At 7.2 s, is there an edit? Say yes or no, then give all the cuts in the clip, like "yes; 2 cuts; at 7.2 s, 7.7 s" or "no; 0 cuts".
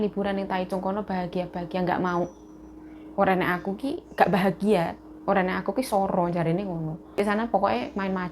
yes; 1 cut; at 7.2 s